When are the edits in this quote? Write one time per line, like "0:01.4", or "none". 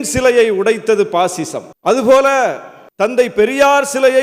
none